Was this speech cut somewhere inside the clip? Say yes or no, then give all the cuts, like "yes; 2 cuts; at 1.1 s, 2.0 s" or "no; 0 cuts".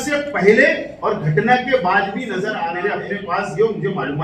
yes; 1 cut; at 2.6 s